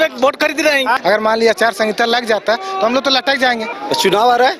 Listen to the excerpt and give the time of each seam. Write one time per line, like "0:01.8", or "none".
0:01.0
0:03.8